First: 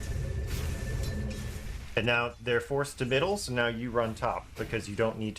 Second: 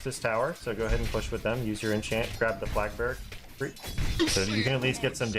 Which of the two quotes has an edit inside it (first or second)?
second